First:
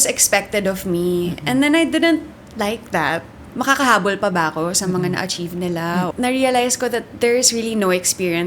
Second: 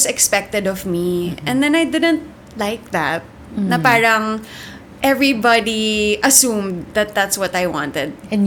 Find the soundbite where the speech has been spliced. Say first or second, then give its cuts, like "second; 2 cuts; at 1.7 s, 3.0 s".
first; 2 cuts; at 3.4 s, 6.1 s